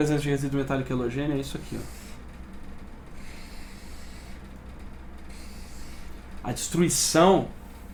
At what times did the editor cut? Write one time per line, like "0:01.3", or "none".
none

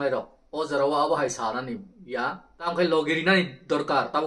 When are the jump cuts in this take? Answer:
0:02.5

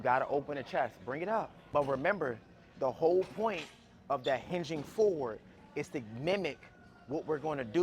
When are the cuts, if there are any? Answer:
0:01.6

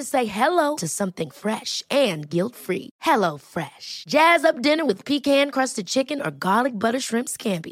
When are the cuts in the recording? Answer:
none

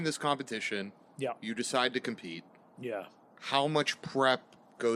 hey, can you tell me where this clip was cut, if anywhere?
none

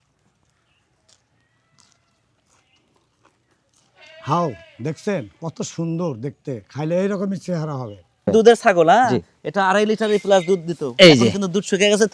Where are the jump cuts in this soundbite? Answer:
0:08.3

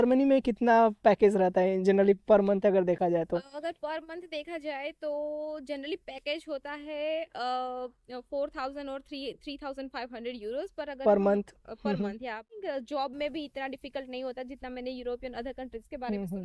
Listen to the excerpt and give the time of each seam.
0:12.6

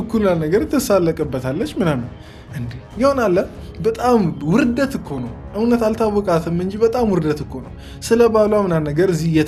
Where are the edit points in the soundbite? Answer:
none

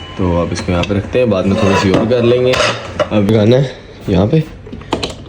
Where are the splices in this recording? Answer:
0:03.3

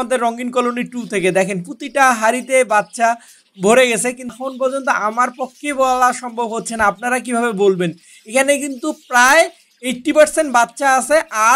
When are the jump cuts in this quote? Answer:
0:04.4

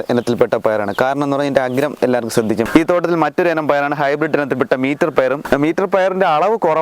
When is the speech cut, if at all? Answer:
0:02.7
0:05.4

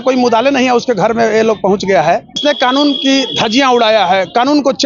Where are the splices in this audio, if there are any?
0:02.4

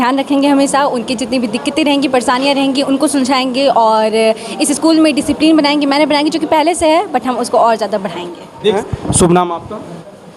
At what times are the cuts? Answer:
0:08.8

